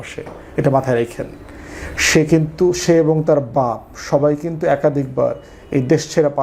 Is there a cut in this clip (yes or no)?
no